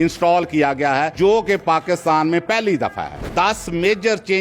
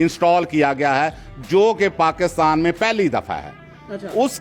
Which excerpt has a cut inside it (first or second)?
first